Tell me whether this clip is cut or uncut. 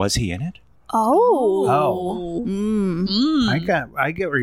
uncut